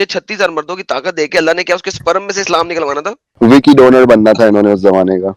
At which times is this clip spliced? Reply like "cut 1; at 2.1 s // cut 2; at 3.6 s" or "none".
cut 1; at 3.2 s